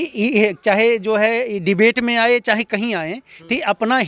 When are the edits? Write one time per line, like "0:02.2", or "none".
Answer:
none